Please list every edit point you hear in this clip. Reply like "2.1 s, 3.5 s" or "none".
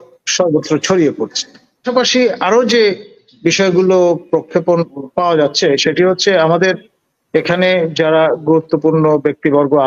1.9 s